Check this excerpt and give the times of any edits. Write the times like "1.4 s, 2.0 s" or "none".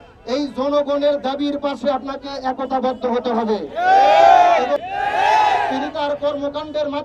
4.8 s